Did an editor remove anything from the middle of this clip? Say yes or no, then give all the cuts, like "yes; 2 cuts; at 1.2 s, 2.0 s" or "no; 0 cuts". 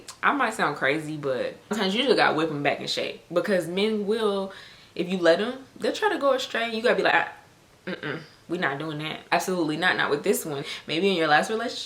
yes; 3 cuts; at 1.7 s, 9.2 s, 10.7 s